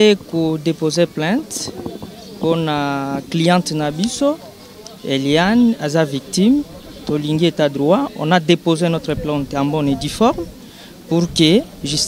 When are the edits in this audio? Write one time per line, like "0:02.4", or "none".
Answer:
none